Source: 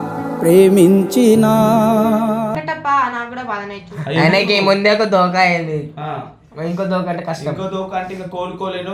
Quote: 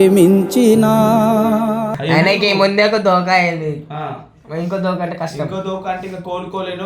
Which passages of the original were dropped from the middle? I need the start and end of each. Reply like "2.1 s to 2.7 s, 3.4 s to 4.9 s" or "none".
2.6 s to 4.0 s